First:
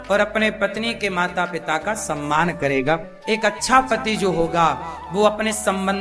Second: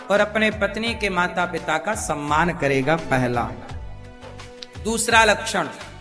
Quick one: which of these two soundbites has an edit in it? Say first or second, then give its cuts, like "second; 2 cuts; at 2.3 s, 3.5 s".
first; 1 cut; at 3.0 s